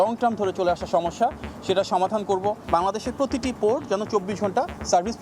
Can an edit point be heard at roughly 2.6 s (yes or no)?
yes